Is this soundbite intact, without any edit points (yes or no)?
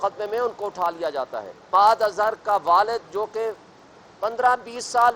no